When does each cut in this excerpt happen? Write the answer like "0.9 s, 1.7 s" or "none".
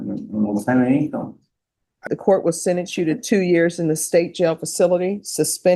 2.1 s